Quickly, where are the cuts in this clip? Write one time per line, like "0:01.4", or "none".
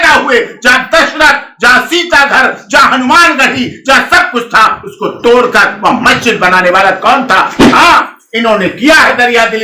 0:07.6